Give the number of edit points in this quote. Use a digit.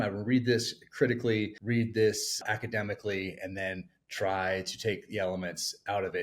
2